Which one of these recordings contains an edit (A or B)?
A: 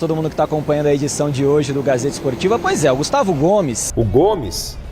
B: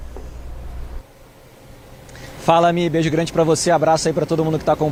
A